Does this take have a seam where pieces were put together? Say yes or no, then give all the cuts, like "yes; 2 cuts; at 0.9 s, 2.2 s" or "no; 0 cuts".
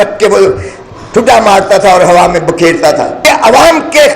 yes; 1 cut; at 3.2 s